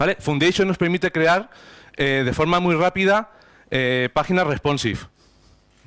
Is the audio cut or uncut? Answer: uncut